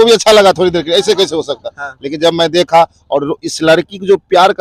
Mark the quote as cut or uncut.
uncut